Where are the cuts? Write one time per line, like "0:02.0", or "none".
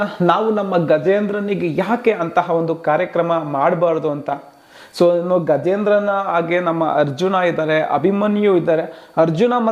none